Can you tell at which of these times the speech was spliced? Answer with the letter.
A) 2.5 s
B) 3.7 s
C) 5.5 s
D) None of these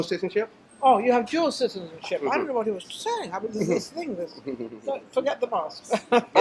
A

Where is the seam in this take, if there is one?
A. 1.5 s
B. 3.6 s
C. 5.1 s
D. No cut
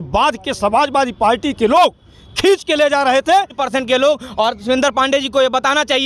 B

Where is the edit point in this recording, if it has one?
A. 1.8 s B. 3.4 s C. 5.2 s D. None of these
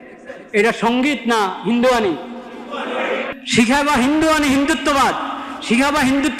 B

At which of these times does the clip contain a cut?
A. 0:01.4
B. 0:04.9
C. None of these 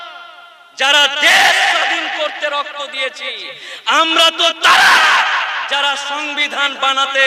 C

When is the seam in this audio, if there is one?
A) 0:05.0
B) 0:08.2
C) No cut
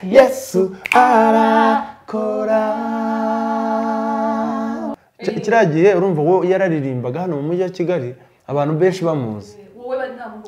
A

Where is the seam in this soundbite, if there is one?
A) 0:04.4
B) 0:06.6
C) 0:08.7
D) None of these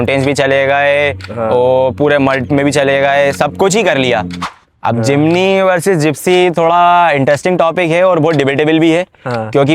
A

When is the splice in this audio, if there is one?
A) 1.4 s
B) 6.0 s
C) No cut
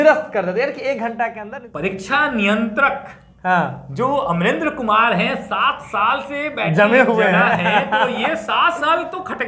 A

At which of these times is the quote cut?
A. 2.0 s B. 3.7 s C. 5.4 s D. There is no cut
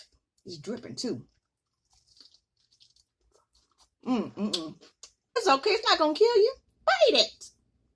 C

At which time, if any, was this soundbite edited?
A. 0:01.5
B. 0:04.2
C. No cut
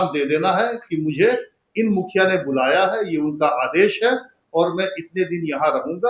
C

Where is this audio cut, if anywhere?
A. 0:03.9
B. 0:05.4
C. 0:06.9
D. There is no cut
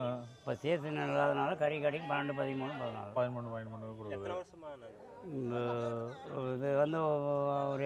D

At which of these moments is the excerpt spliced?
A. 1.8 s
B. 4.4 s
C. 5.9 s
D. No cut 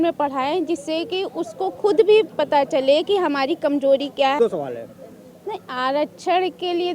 B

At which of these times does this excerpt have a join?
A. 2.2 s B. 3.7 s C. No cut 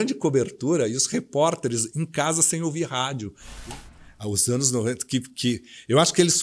B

